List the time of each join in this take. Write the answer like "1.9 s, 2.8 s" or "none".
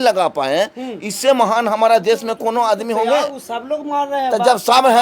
none